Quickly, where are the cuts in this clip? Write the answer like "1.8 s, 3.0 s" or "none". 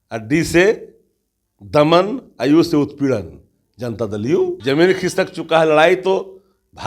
4.6 s

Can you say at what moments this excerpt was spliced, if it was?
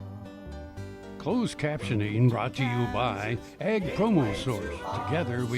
1.2 s

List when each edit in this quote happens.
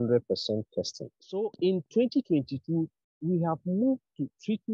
1.4 s

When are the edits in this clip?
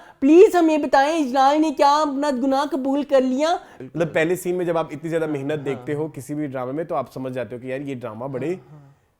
3.7 s

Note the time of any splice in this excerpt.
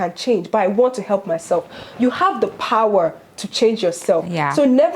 none

